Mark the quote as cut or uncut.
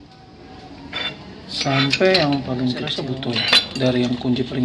cut